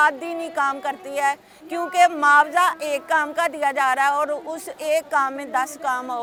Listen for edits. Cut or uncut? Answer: uncut